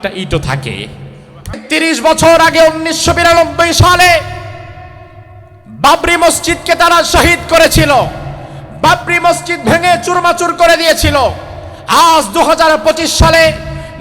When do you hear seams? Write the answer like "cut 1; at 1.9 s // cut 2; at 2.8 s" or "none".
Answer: cut 1; at 1.6 s